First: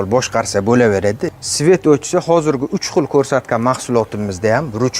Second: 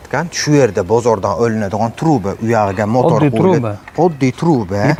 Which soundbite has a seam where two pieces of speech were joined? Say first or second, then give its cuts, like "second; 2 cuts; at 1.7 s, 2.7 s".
first; 1 cut; at 1.2 s